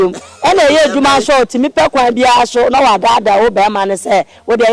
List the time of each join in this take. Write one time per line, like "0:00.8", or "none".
none